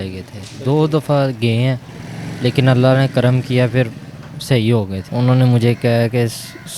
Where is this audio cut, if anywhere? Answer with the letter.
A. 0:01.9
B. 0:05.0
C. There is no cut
B